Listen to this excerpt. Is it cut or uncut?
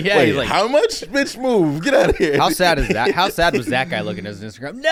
uncut